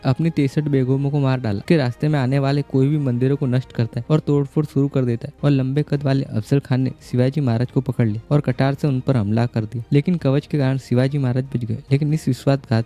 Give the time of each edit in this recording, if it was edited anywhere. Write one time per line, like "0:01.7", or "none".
0:01.6
0:05.4